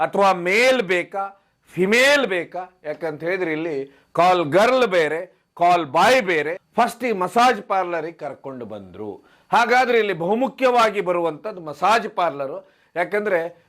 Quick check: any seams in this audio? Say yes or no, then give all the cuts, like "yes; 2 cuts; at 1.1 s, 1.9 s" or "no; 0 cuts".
yes; 1 cut; at 6.6 s